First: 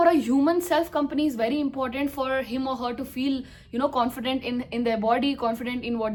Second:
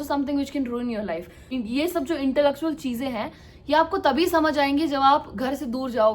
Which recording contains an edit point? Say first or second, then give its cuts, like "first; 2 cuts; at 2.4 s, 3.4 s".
second; 1 cut; at 1.4 s